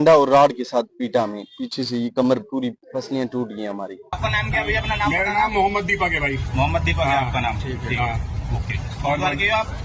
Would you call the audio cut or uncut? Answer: cut